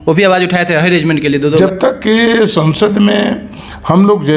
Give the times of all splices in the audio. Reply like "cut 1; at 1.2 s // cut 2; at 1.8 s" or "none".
cut 1; at 1.6 s